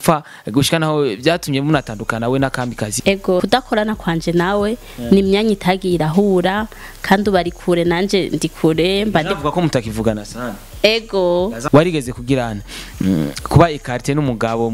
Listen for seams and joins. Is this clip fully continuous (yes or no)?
no